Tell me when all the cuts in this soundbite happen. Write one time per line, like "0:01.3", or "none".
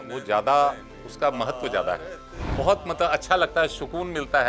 0:02.4